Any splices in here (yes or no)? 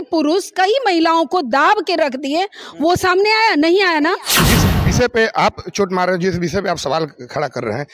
yes